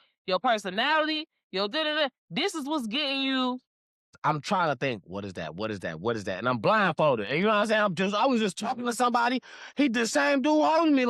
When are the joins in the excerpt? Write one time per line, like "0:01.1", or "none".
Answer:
0:04.1

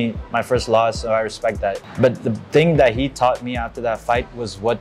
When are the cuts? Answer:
0:01.8

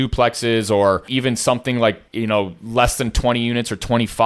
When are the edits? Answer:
0:01.1
0:02.1

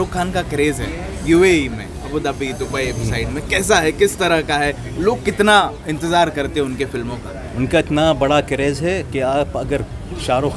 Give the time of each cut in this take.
none

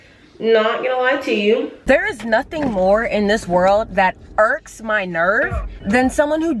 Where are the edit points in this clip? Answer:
0:01.8
0:05.7

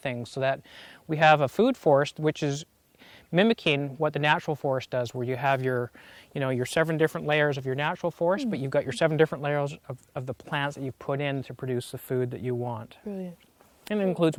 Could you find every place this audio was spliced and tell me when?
none

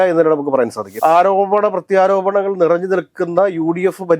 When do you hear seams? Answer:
0:01.0

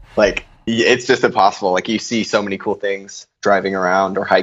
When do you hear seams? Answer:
0:03.3

